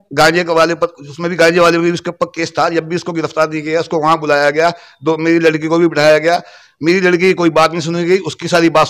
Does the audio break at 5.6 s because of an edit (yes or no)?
no